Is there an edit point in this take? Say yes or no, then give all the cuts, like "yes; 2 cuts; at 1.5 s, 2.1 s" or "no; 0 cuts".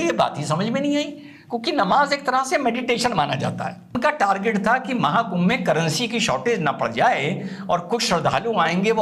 yes; 1 cut; at 4.0 s